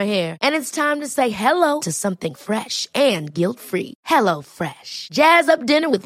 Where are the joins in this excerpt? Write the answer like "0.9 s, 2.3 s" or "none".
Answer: none